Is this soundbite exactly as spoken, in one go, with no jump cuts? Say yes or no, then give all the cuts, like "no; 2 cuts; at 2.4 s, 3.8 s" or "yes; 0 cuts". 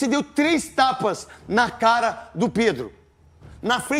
yes; 0 cuts